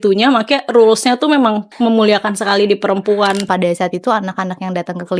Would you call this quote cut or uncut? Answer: cut